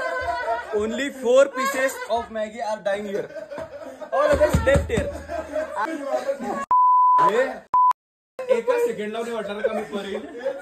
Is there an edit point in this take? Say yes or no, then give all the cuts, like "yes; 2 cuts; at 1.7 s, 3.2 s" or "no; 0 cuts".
yes; 1 cut; at 5.9 s